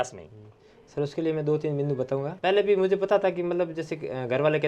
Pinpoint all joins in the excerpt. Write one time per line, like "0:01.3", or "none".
0:02.3